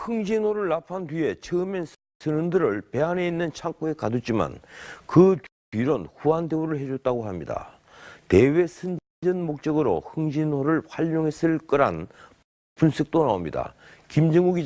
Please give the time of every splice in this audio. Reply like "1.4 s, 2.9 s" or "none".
none